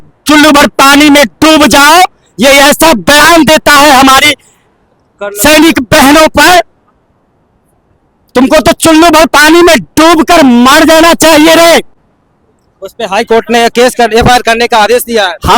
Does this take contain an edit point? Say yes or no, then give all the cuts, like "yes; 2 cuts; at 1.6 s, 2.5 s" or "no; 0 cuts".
no; 0 cuts